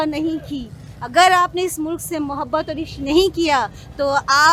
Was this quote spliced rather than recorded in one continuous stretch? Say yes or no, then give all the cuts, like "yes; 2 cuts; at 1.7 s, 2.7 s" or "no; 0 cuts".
no; 0 cuts